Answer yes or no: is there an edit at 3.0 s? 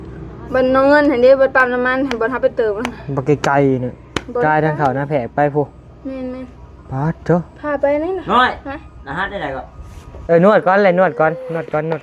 no